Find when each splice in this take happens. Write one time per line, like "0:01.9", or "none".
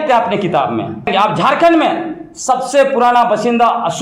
0:01.1